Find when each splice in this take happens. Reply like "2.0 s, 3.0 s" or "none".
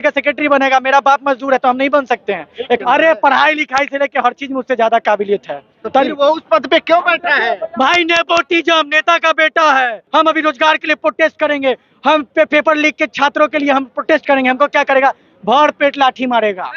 2.8 s, 10.0 s